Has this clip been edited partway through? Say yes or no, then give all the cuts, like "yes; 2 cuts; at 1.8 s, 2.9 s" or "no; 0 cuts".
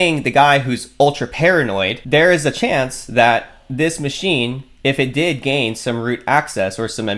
no; 0 cuts